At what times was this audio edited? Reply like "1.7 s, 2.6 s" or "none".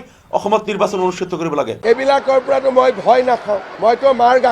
1.7 s